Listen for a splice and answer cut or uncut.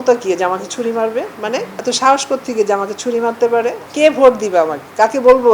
cut